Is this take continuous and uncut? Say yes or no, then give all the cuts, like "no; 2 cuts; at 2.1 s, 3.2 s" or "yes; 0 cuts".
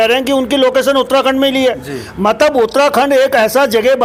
yes; 0 cuts